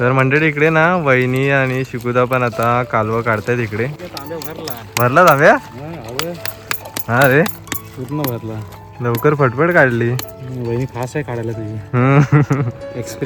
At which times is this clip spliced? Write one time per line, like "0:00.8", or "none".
none